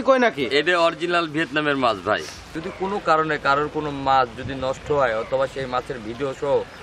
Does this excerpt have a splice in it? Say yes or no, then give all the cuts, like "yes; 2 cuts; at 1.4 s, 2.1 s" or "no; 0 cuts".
yes; 1 cut; at 2.5 s